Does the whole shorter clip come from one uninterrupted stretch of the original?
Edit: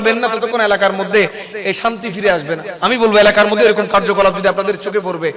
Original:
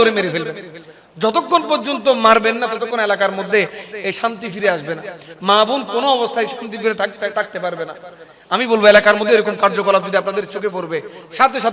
no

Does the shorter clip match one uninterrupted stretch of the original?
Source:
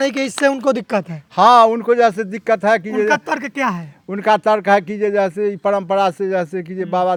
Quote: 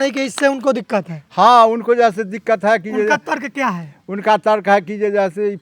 yes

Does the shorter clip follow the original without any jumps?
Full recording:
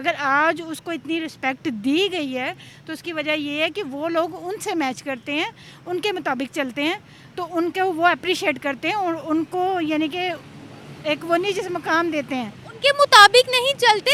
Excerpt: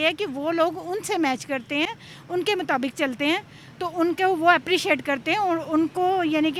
yes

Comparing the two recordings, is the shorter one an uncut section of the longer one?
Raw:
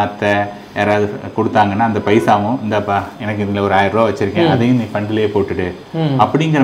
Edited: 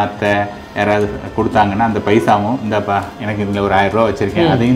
yes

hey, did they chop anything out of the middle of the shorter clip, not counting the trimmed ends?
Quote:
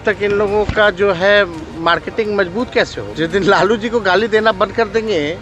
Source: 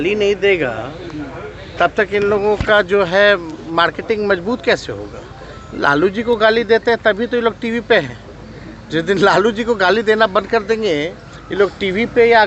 yes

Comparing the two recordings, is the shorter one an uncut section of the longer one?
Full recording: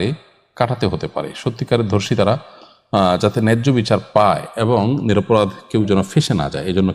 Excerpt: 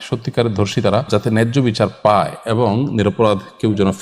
no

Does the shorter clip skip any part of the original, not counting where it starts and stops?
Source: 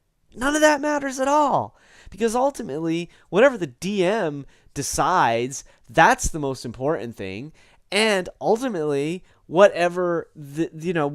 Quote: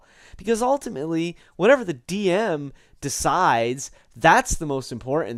no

